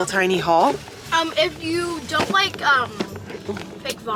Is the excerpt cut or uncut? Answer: uncut